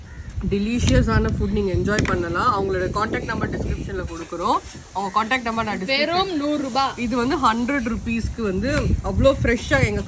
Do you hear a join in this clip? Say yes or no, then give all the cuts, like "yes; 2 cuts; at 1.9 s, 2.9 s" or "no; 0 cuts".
no; 0 cuts